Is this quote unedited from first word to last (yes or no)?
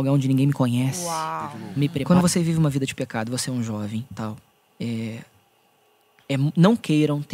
no